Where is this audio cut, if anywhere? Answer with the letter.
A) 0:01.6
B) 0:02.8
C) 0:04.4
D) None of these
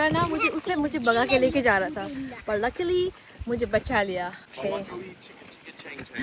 C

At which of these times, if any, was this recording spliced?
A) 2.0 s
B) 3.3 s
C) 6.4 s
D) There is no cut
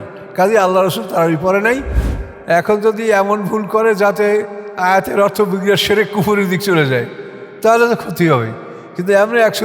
A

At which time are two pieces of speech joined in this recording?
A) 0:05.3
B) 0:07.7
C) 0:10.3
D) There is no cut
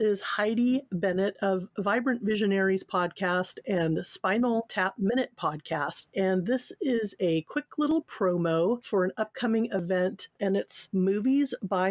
C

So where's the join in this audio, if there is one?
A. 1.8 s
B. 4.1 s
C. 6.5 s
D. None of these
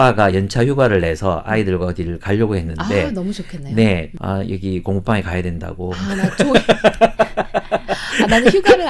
B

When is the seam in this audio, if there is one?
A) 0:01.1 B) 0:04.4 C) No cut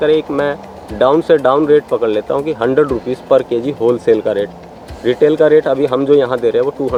C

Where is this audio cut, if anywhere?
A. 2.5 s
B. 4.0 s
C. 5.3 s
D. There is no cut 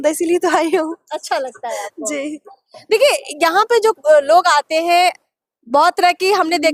D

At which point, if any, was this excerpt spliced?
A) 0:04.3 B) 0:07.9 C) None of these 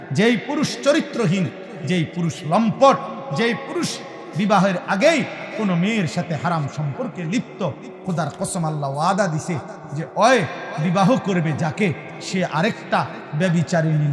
C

